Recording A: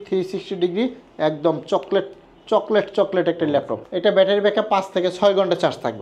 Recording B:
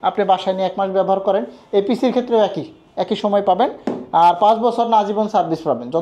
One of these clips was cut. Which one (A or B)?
A